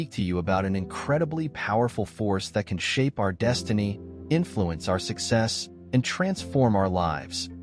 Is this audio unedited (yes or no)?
yes